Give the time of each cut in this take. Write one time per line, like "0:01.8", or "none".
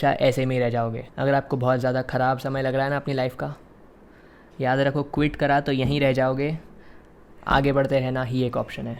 0:01.0

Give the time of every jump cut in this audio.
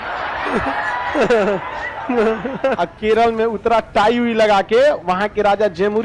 0:02.8

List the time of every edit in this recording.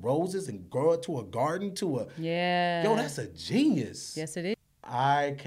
0:04.5

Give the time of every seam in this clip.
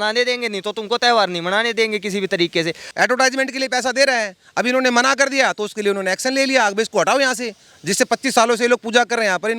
0:02.8

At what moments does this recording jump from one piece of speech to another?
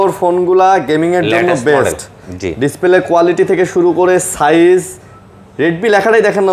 none

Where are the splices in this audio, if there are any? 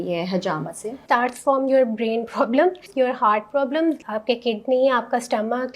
0:01.0
0:02.9
0:04.0

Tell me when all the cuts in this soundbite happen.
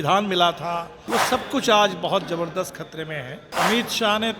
0:00.9
0:03.5

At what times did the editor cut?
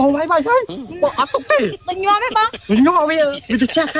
none

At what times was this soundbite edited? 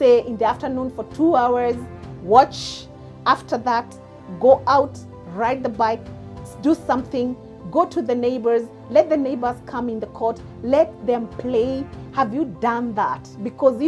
none

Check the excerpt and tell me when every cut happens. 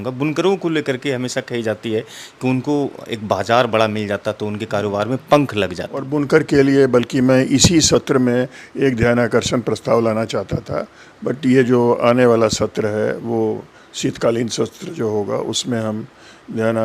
0:06.1

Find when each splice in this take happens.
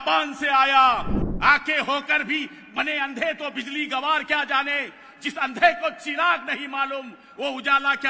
0:01.1

